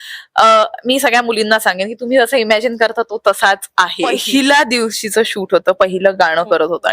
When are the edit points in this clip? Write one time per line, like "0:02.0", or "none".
0:04.2